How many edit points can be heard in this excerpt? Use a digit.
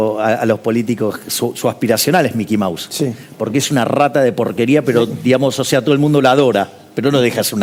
0